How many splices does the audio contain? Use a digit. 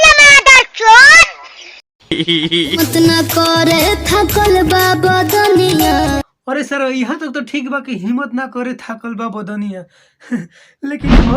1